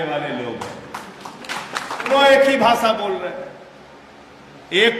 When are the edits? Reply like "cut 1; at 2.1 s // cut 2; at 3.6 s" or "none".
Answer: cut 1; at 2.1 s